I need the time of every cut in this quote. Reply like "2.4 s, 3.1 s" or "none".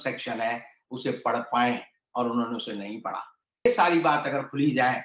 3.7 s